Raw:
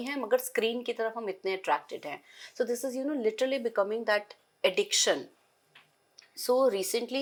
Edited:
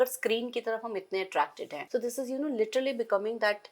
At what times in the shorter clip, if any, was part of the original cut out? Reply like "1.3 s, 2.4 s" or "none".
1.7 s